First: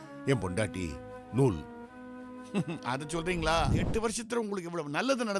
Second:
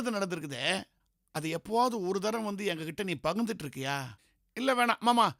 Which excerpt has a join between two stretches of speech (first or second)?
first